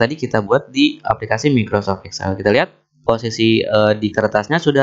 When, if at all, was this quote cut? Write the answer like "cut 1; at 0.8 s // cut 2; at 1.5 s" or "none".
none